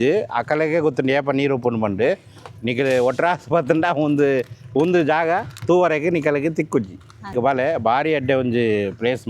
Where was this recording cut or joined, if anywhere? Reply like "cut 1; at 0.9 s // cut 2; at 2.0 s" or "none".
cut 1; at 7.3 s